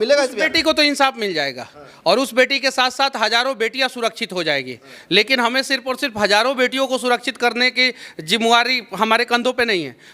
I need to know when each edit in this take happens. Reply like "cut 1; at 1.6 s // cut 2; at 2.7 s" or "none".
none

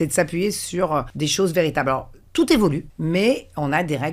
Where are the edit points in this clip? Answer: cut 1; at 1.1 s // cut 2; at 2.9 s

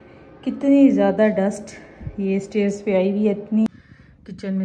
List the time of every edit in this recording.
cut 1; at 3.7 s

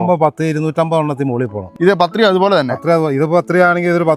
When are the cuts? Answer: cut 1; at 1.6 s

